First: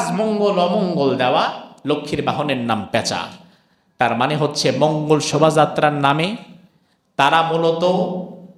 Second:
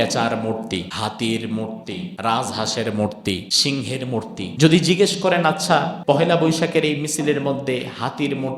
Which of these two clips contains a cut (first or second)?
second